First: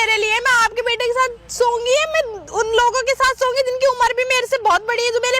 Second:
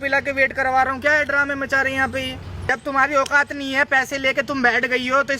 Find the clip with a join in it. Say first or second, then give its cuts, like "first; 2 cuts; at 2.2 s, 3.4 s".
second; 1 cut; at 2.7 s